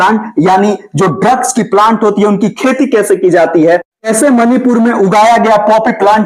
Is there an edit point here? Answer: no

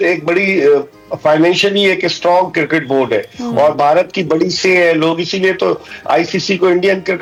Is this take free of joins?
yes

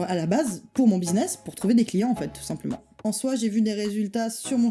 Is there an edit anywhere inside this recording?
yes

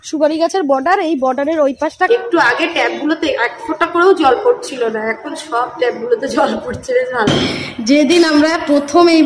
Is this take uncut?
no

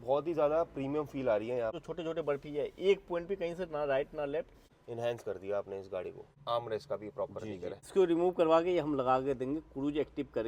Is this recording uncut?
no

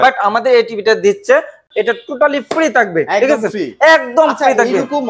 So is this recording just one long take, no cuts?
no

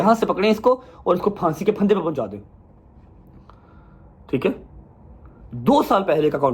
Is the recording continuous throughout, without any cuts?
yes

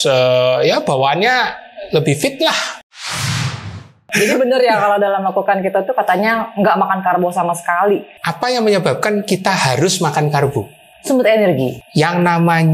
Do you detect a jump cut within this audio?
yes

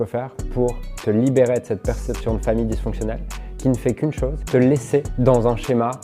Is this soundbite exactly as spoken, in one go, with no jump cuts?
no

